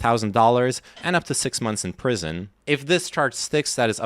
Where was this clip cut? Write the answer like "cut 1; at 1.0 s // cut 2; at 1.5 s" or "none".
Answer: cut 1; at 2.5 s